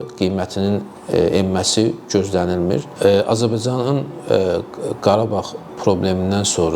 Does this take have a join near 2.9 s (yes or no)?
yes